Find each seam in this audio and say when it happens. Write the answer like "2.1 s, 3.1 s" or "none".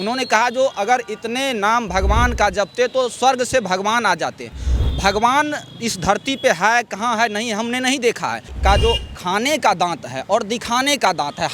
8.5 s

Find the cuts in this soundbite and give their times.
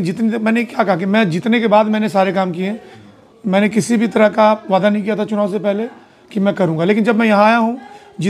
2.9 s

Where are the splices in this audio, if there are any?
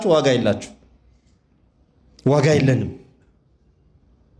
none

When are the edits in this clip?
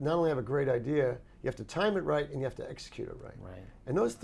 none

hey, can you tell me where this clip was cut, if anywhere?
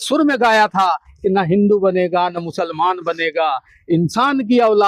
none

